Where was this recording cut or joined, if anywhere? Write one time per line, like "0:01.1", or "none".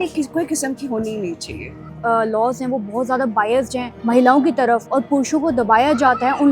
0:01.9
0:03.9
0:04.9